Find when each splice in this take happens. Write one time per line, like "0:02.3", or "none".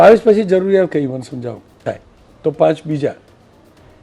0:01.8